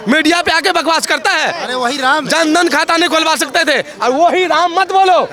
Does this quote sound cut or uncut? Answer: uncut